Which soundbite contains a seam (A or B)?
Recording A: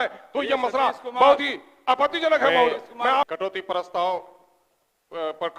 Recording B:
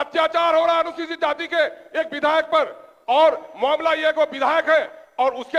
A